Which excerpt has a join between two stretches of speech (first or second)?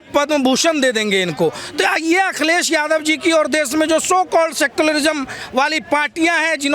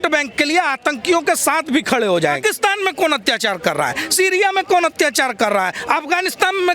second